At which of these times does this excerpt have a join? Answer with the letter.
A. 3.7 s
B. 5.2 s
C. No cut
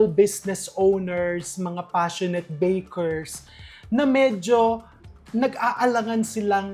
C